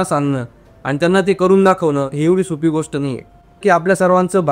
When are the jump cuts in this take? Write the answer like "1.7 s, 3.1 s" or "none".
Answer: 3.6 s